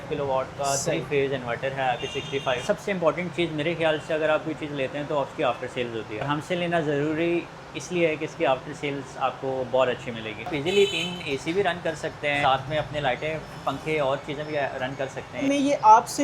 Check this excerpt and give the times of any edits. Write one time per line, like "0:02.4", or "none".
0:02.6
0:10.5
0:12.4
0:15.4